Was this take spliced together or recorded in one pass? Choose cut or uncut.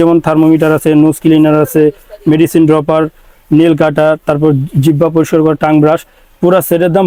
uncut